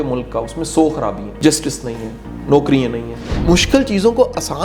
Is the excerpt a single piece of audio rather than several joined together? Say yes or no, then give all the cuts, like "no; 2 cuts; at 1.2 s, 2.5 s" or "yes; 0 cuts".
no; 2 cuts; at 1.3 s, 3.1 s